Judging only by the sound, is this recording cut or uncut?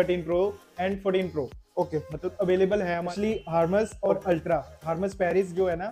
cut